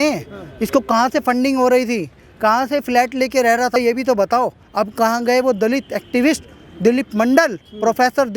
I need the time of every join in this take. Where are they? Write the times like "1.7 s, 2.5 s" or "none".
3.8 s, 4.6 s